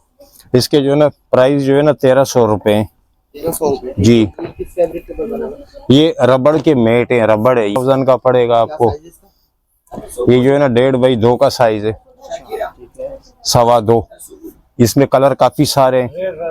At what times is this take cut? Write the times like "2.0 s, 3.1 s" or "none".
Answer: 7.8 s